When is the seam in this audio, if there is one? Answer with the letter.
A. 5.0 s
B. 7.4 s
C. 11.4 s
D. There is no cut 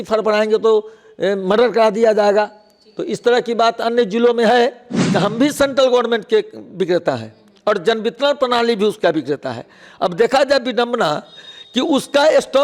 A